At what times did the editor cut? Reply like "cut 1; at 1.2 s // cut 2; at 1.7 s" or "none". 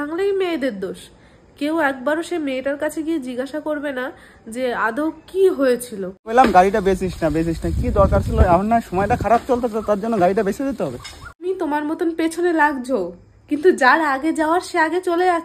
cut 1; at 6.3 s // cut 2; at 11.4 s